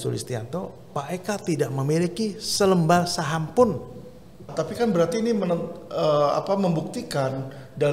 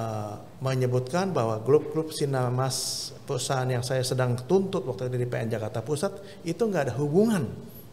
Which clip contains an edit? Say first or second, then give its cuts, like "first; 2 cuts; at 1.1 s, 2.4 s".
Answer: first; 1 cut; at 4.5 s